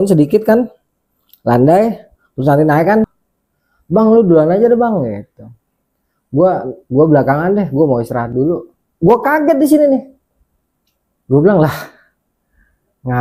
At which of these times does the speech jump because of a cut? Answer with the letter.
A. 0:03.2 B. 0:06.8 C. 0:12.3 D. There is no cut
A